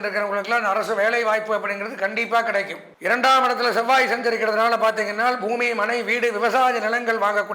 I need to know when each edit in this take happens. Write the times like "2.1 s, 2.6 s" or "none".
2.8 s